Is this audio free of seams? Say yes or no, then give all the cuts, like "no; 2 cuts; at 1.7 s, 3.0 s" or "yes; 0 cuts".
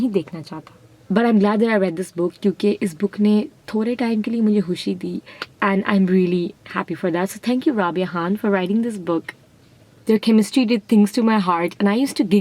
no; 2 cuts; at 0.9 s, 9.9 s